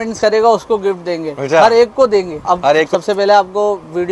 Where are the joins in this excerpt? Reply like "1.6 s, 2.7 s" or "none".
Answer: 2.9 s